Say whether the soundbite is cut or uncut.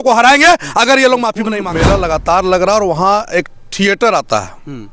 cut